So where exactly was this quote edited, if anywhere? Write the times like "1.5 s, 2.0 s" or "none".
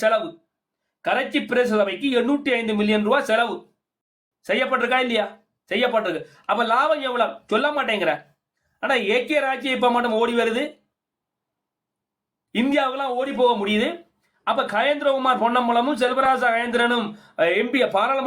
none